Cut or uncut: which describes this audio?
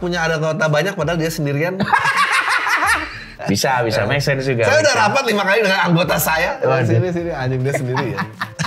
uncut